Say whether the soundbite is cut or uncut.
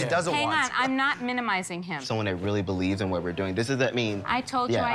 uncut